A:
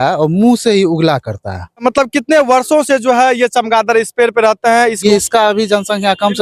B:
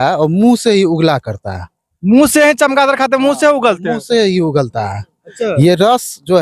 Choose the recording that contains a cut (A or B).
A